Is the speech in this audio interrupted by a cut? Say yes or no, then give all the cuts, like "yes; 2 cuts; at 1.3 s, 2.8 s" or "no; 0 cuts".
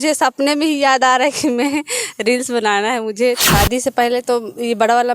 yes; 1 cut; at 3.4 s